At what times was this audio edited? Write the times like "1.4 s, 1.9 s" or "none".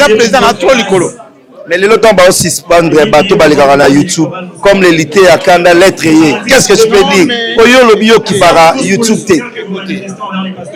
none